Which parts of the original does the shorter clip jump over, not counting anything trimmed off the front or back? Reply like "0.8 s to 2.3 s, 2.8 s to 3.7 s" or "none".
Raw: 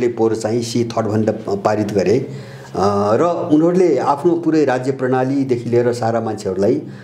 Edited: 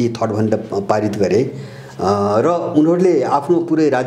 none